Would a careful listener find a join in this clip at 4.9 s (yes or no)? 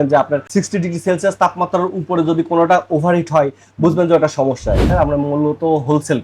yes